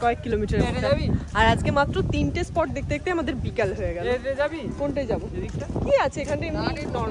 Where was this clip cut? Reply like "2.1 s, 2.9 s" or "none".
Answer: none